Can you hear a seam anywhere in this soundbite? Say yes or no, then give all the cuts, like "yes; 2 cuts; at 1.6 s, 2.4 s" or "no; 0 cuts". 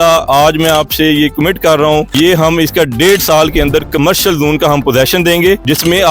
yes; 1 cut; at 2.1 s